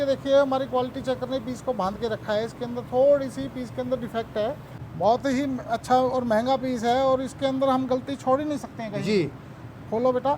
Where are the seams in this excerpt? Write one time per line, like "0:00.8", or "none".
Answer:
0:04.7